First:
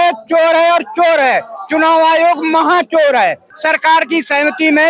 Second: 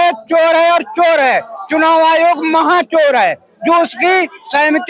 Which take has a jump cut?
first; 1 cut; at 3.5 s

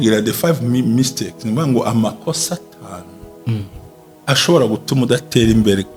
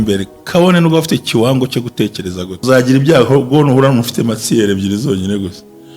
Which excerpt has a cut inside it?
second; 1 cut; at 2.6 s

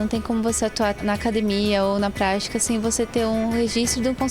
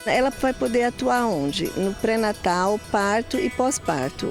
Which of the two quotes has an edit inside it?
first; 1 cut; at 1.0 s

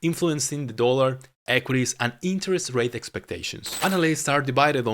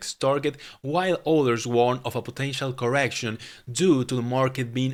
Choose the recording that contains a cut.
first; 1 cut; at 3.6 s

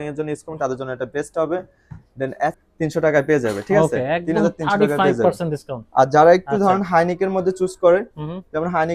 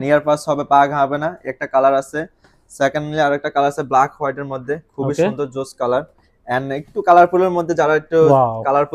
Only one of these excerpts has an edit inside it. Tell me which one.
first; 1 cut; at 2.5 s

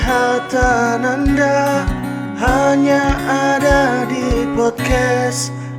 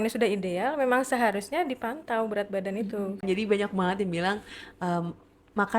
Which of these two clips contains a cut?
second; 1 cut; at 3.2 s

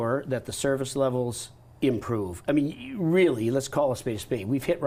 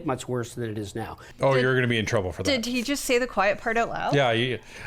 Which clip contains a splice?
second; 1 cut; at 1.2 s

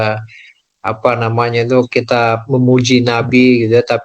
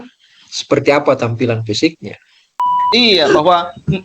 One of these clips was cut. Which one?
second; 1 cut; at 2.7 s

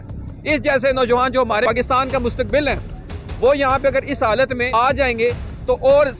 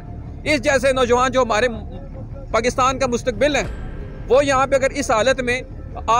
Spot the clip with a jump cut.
first; 2 cuts; at 1.7 s, 4.7 s

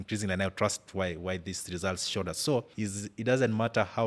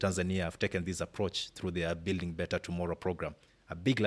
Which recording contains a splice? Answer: first; 1 cut; at 2.7 s

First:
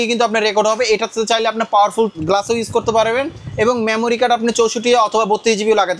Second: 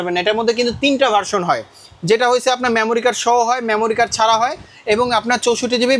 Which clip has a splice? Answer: first; 1 cut; at 2.1 s

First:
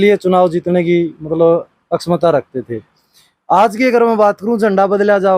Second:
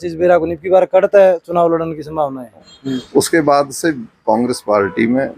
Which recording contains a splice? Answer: second; 1 cut; at 2.7 s

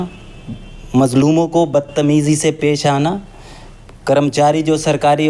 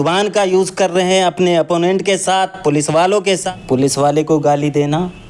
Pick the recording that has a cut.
second; 1 cut; at 3.4 s

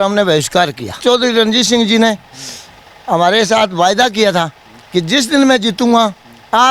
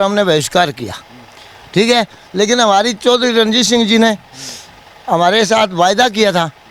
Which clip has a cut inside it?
first; 1 cut; at 0.9 s

